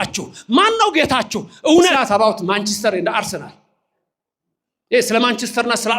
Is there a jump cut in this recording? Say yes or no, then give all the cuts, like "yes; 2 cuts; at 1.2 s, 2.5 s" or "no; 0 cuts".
yes; 1 cut; at 1.9 s